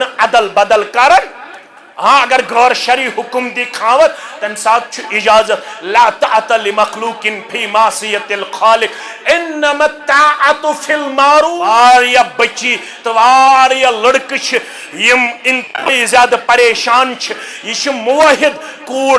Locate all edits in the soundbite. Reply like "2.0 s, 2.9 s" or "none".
11.6 s

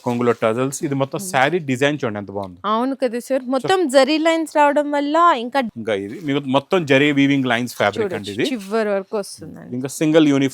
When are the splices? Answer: 5.7 s

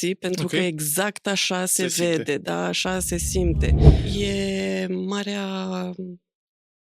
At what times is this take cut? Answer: 3.9 s

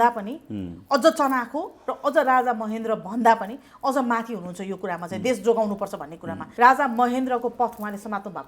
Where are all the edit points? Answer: 6.4 s

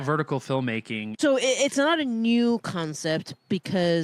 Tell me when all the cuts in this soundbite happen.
1.0 s

